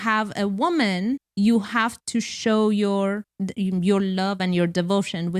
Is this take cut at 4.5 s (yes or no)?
no